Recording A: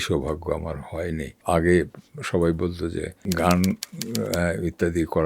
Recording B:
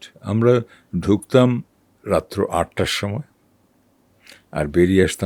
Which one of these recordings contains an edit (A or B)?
A